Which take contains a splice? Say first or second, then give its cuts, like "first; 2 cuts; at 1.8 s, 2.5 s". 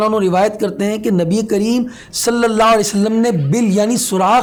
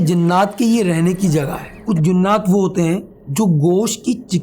second; 2 cuts; at 1.7 s, 3.2 s